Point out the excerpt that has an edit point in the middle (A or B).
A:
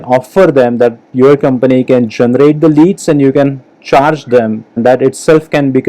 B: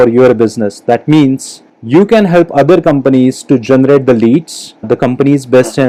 A